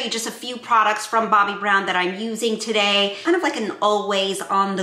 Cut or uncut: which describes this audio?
uncut